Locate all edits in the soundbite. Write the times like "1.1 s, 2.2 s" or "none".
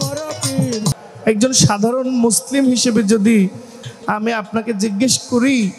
1.1 s